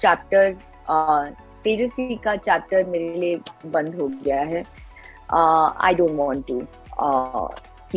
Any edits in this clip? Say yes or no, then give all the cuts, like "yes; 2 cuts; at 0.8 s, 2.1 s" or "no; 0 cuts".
no; 0 cuts